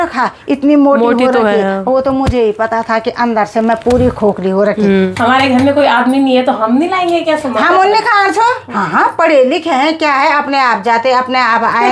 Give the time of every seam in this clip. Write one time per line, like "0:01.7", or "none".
0:05.1
0:08.7